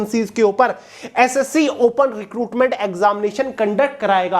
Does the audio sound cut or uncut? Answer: uncut